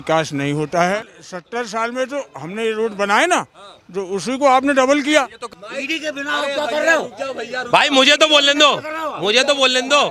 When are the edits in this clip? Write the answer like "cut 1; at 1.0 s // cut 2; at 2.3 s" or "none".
cut 1; at 1.0 s // cut 2; at 5.4 s